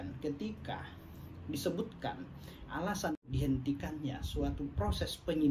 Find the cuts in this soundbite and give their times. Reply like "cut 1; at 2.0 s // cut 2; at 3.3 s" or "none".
cut 1; at 3.3 s